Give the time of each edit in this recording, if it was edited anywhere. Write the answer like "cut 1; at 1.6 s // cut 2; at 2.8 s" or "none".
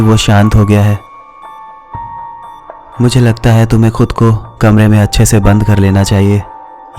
cut 1; at 1.2 s // cut 2; at 2.9 s